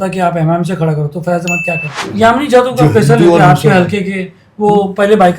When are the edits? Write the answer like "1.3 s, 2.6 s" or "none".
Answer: 1.9 s